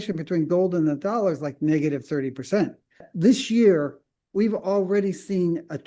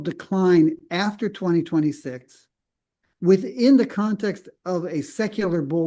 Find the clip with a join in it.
first; 1 cut; at 3.0 s

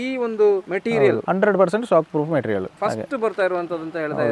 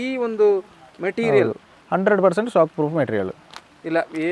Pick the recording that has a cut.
first; 2 cuts; at 0.9 s, 2.7 s

